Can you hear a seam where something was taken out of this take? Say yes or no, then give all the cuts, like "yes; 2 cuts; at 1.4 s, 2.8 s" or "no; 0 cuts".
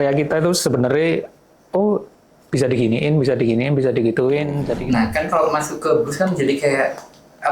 yes; 1 cut; at 4.8 s